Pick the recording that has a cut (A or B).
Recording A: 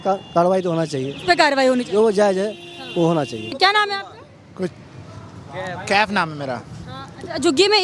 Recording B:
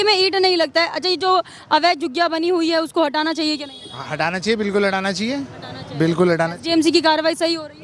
A